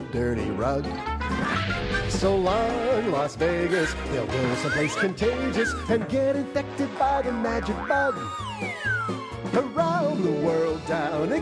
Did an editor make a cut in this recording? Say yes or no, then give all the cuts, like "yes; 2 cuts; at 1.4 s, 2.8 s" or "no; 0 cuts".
no; 0 cuts